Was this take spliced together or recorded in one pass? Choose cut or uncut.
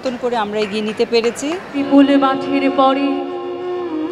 uncut